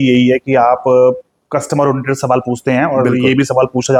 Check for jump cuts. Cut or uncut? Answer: uncut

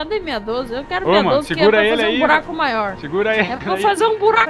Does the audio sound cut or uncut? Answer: cut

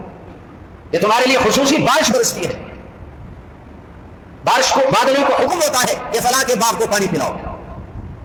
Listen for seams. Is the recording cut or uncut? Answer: uncut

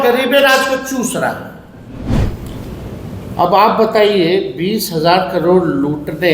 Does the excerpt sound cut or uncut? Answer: cut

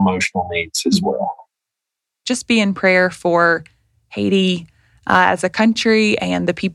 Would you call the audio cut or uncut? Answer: cut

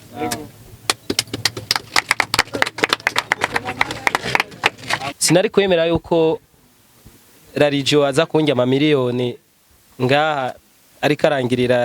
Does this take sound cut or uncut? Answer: cut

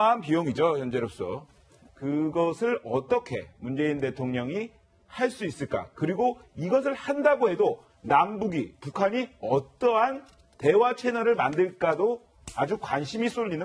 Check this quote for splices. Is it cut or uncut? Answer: cut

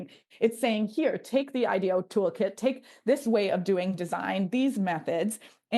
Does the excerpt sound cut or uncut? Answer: uncut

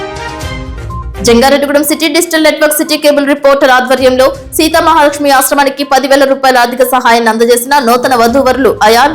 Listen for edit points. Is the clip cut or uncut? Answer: cut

